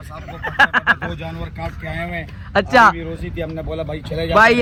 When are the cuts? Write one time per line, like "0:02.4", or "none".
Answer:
none